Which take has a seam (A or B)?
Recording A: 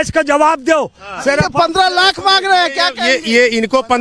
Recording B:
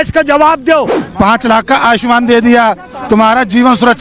B